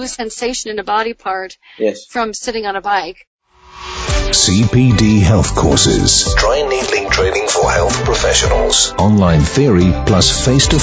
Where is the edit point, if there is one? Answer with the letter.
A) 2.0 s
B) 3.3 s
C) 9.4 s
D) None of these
B